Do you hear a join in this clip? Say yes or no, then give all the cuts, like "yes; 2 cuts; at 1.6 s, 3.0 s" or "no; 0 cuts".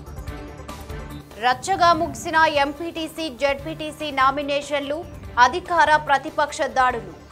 no; 0 cuts